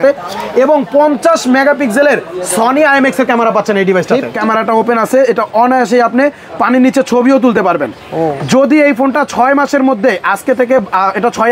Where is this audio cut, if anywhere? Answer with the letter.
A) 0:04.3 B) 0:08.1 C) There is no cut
A